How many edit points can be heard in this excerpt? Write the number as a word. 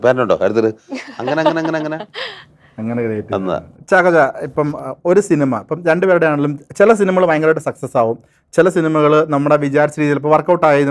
zero